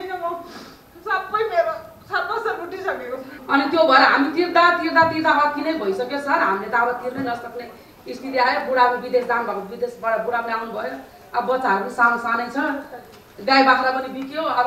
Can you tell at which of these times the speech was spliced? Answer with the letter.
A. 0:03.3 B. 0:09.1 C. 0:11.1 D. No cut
A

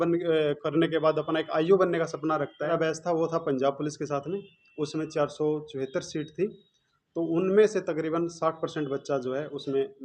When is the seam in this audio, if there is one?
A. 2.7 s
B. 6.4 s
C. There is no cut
A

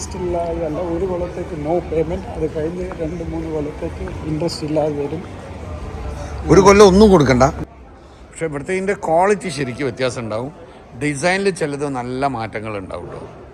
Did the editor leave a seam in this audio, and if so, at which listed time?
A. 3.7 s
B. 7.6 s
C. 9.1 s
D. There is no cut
B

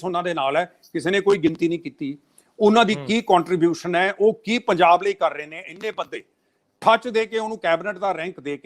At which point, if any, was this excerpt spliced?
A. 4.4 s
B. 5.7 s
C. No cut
C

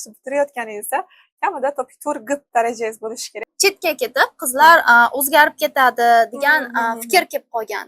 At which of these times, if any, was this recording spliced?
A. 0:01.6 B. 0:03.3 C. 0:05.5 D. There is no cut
B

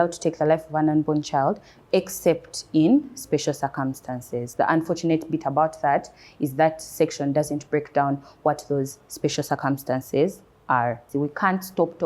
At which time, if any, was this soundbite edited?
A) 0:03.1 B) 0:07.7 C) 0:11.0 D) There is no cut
C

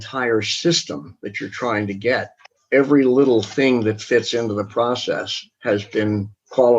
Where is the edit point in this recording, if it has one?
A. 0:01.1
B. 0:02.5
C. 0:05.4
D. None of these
B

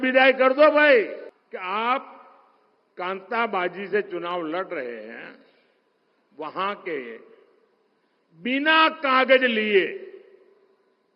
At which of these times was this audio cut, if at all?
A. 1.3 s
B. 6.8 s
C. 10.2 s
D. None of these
A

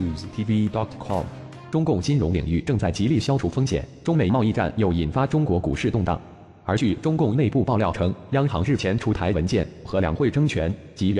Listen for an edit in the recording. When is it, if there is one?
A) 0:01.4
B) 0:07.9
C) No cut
A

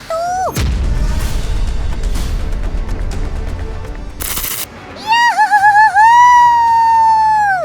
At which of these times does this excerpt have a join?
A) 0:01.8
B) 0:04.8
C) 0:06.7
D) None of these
B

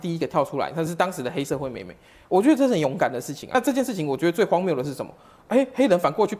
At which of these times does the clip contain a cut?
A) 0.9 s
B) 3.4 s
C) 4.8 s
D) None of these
B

